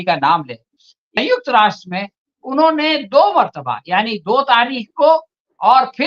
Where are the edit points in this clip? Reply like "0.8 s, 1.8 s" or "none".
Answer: 1.0 s

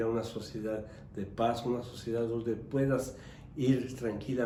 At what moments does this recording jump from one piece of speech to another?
none

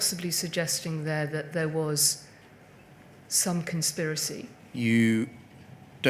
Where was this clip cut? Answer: 4.6 s

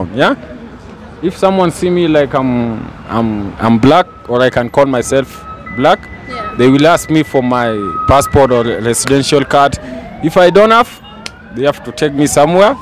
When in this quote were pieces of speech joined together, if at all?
none

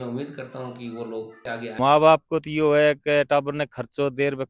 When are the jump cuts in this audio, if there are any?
1.8 s

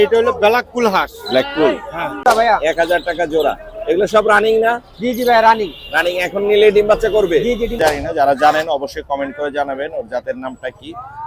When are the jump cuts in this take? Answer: 2.2 s, 7.8 s

